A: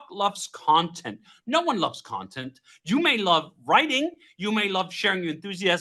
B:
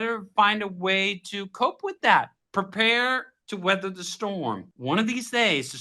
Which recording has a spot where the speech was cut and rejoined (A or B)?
B